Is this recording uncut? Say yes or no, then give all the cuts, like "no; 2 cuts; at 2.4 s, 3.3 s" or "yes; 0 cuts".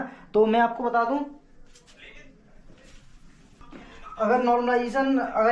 no; 1 cut; at 3.6 s